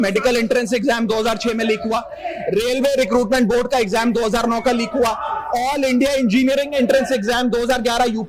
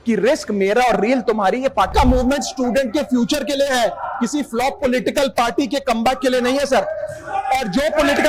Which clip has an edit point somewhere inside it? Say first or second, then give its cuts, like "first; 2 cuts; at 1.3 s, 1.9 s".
second; 1 cut; at 1.9 s